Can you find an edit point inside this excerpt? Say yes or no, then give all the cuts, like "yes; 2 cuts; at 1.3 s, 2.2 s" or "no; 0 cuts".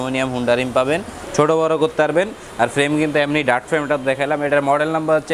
yes; 1 cut; at 1.2 s